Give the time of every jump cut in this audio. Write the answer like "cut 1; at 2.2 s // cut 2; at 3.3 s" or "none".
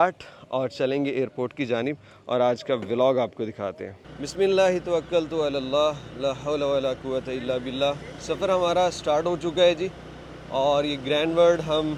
none